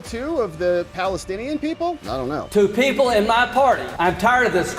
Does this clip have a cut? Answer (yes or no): yes